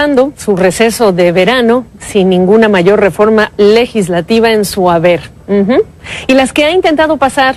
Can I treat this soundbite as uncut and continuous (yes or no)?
no